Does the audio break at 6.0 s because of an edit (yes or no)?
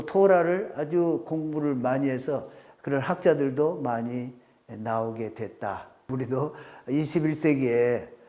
yes